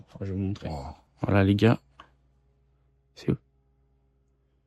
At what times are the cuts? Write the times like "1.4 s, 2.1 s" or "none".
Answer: 1.0 s